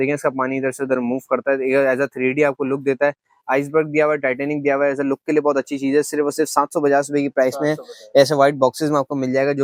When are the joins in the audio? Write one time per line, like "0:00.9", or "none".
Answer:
none